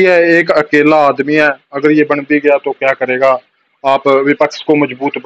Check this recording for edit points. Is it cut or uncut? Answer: uncut